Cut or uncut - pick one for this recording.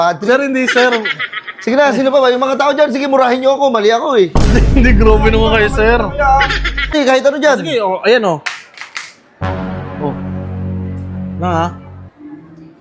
cut